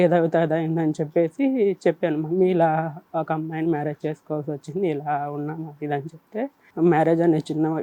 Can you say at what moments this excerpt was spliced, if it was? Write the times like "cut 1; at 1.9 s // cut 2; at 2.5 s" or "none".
cut 1; at 6.7 s